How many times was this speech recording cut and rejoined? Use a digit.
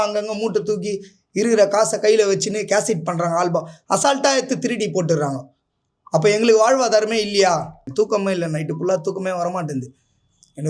1